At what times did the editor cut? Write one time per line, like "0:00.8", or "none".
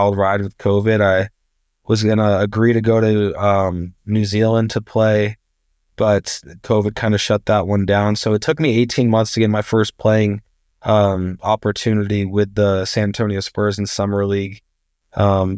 none